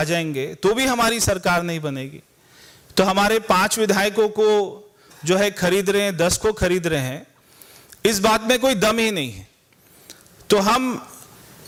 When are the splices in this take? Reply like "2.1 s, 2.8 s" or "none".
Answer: none